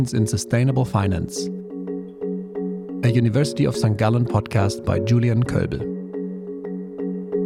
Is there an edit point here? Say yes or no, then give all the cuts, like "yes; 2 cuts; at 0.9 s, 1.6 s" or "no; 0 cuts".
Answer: no; 0 cuts